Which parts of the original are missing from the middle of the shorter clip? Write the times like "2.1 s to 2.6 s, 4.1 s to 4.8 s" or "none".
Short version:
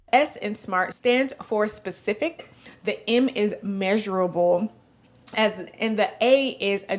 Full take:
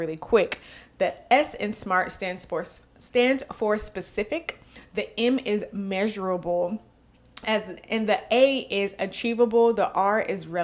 2.1 s to 3.0 s